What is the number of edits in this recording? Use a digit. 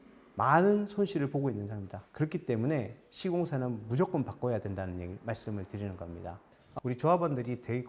1